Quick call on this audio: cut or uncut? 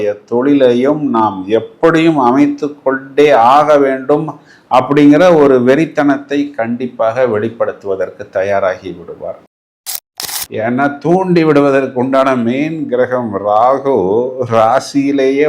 cut